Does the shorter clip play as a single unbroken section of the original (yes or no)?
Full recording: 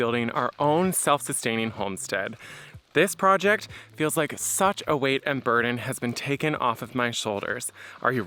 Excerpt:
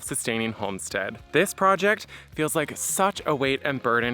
no